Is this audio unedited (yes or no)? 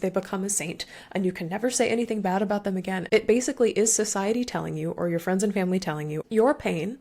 no